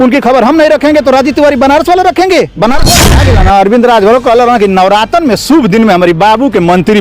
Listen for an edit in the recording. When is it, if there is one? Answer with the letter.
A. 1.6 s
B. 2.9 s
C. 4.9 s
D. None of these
B